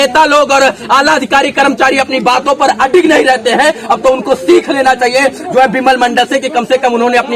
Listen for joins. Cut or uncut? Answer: uncut